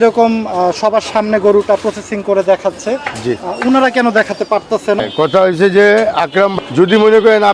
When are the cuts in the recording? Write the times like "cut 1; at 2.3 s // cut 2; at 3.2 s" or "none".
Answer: cut 1; at 5.0 s // cut 2; at 6.5 s